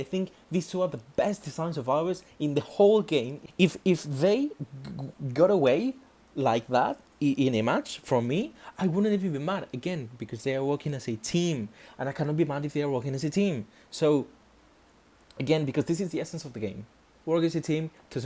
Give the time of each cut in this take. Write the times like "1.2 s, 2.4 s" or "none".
3.4 s

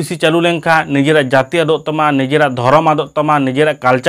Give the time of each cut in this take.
none

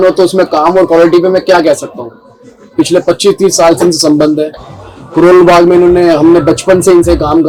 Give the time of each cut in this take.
none

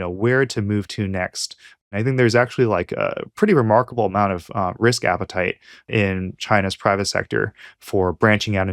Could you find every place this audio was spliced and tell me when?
1.8 s, 5.9 s

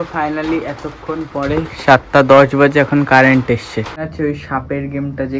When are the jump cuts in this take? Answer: 4.1 s

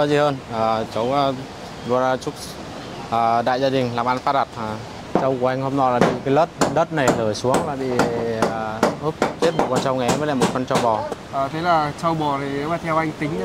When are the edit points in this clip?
5.0 s, 11.0 s

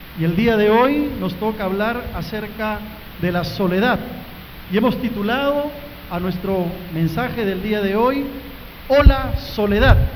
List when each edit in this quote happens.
6.0 s

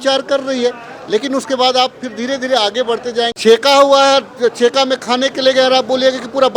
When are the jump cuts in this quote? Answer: 3.3 s

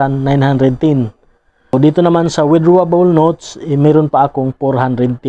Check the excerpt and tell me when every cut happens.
1.7 s

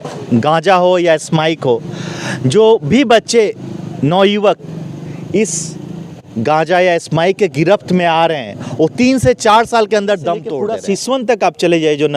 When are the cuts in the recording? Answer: 10.5 s

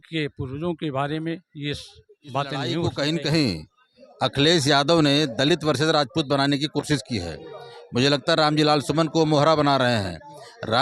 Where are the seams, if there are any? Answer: 2.8 s

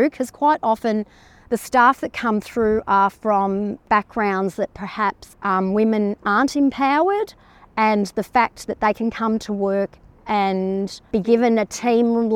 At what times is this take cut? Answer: 3.8 s, 5.3 s

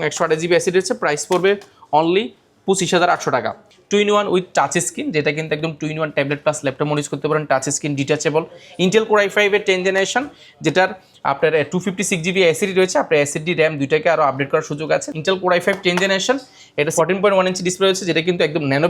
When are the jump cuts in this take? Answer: 3.6 s, 15.1 s, 16.9 s

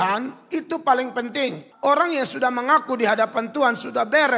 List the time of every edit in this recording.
1.7 s

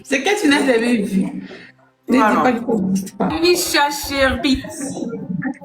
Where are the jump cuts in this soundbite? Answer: 3.3 s

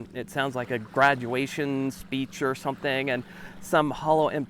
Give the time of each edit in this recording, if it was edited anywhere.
none

